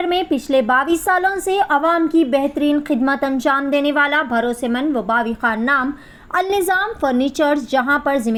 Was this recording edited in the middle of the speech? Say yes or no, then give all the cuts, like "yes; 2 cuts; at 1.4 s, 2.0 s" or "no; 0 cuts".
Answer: no; 0 cuts